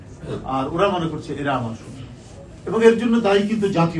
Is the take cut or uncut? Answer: uncut